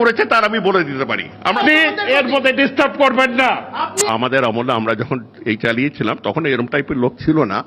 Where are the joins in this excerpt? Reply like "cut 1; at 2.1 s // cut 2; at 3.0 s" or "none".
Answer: cut 1; at 1.6 s // cut 2; at 4.0 s